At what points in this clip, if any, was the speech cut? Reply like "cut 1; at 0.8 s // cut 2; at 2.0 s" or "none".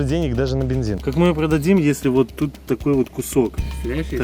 cut 1; at 1.0 s